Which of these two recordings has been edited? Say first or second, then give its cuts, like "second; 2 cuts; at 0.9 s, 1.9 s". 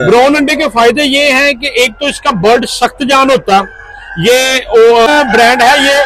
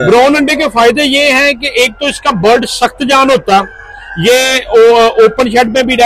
first; 1 cut; at 5.1 s